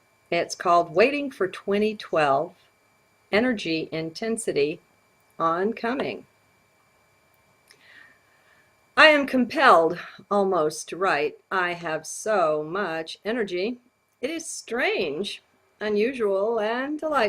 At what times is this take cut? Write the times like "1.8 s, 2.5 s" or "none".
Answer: 7.7 s